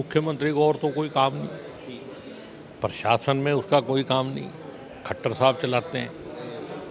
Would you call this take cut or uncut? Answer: uncut